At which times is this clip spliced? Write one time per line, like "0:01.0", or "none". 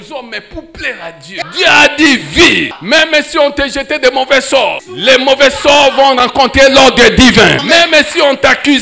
0:01.4
0:02.8
0:04.9
0:07.6